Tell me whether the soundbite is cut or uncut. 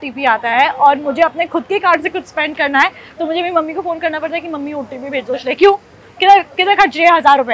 uncut